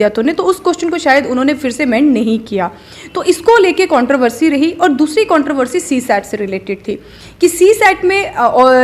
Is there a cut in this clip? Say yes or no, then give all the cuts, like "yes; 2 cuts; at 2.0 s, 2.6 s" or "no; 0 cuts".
no; 0 cuts